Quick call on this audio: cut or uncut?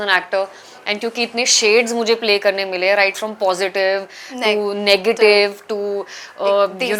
uncut